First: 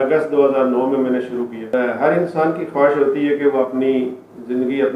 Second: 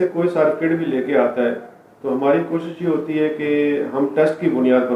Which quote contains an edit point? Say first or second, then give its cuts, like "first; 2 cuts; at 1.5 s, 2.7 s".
first; 1 cut; at 1.7 s